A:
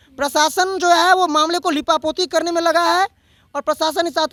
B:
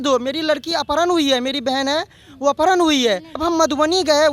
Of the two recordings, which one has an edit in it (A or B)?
B